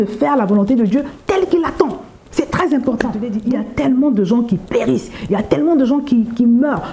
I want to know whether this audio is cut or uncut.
cut